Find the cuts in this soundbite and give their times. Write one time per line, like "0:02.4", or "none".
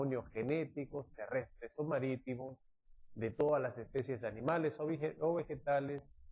0:03.5